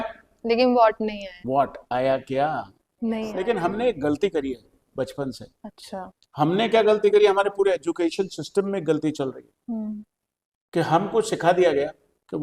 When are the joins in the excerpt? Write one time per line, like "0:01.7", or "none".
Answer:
0:03.3